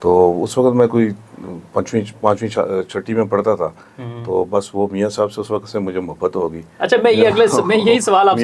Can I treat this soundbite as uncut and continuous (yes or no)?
yes